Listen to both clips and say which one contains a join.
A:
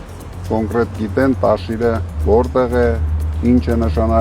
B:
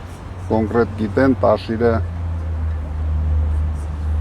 A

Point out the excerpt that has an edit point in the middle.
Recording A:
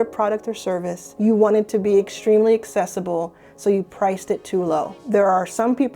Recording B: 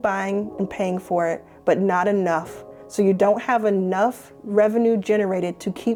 A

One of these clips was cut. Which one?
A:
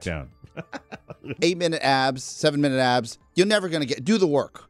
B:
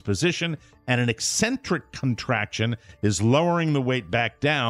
A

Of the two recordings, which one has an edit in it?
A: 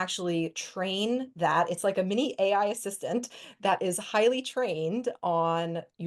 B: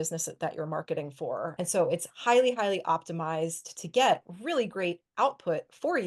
B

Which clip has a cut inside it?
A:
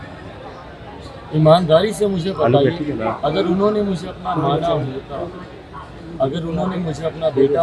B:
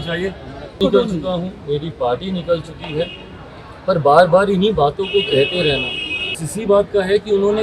B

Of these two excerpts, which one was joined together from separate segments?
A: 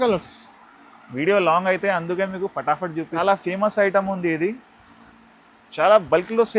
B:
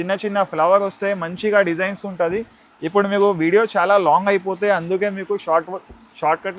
A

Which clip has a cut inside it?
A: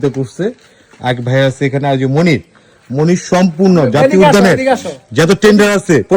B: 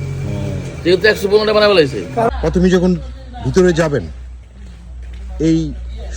B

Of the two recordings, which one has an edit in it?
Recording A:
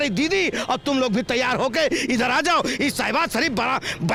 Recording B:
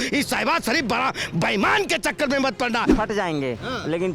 B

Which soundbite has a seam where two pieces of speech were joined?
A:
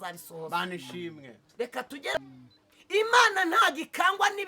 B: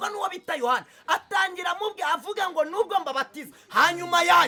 A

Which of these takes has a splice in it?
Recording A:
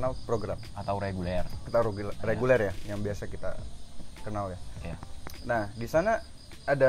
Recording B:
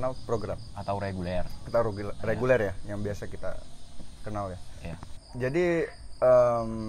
B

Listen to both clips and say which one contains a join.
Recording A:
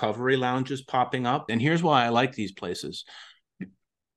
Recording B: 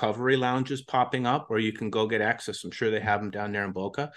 A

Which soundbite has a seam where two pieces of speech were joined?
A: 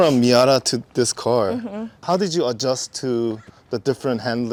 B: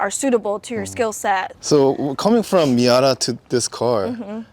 B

